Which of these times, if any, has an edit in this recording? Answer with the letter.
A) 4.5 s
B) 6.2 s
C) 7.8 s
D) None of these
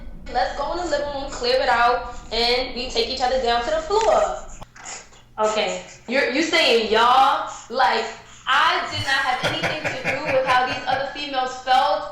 A